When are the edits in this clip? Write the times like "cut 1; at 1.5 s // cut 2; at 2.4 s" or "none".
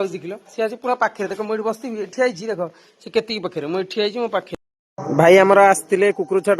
cut 1; at 4.6 s